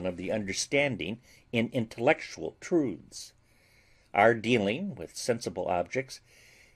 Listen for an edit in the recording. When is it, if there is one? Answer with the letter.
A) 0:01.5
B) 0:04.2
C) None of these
B